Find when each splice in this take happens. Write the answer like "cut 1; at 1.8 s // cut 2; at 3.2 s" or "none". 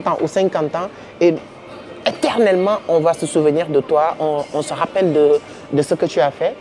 none